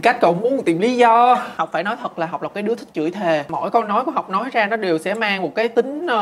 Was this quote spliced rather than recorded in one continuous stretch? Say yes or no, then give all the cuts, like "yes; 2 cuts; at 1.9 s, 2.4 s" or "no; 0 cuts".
yes; 2 cuts; at 1.6 s, 3.4 s